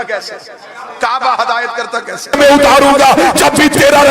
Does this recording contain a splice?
yes; 1 cut; at 2.4 s

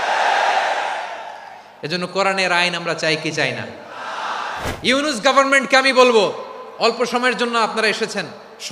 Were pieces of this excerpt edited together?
yes; 1 cut; at 4.7 s

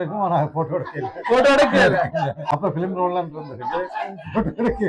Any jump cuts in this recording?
yes; 1 cut; at 2.5 s

